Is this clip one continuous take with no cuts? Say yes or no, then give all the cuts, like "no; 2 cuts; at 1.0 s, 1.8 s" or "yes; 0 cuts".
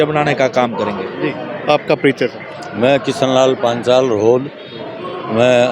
yes; 0 cuts